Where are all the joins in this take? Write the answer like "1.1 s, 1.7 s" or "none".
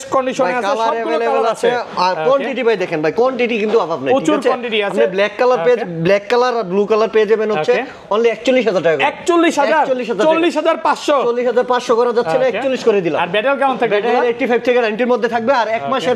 none